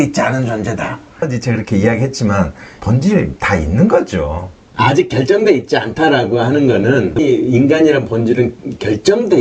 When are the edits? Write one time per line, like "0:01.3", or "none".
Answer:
0:01.1
0:02.8
0:07.2